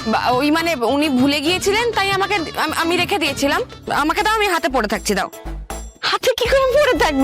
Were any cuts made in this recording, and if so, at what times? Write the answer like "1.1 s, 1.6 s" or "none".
3.8 s